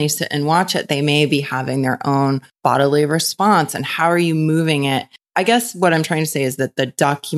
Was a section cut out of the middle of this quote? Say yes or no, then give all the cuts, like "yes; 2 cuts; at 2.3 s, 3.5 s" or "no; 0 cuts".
yes; 1 cut; at 2.5 s